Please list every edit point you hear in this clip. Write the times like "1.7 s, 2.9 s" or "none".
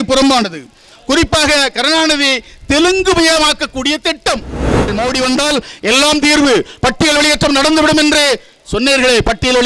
4.9 s